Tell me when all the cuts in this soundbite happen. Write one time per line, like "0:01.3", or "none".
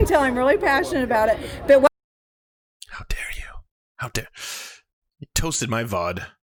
none